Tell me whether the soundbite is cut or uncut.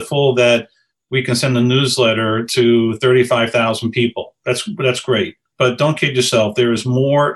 cut